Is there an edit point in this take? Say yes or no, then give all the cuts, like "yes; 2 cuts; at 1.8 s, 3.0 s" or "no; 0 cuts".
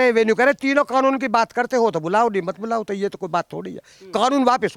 no; 0 cuts